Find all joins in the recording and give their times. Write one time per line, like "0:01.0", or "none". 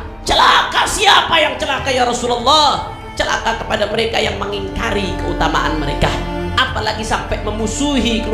none